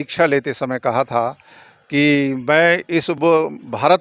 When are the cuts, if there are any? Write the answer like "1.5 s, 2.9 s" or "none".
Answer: none